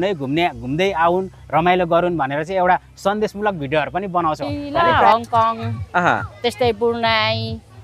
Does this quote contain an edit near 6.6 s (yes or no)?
no